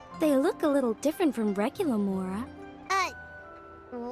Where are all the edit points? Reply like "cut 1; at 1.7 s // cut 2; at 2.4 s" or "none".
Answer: cut 1; at 2.9 s

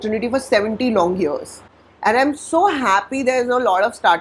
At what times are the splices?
none

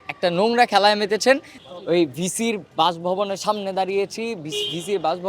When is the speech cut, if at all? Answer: cut 1; at 1.5 s

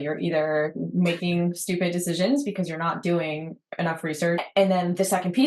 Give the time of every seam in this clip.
cut 1; at 4.5 s

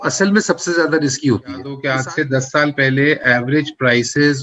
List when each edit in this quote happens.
cut 1; at 1.8 s

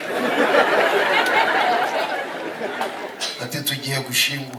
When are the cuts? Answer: cut 1; at 3.2 s

